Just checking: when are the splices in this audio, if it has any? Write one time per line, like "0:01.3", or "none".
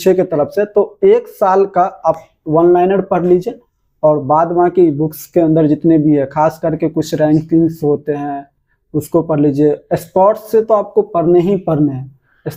none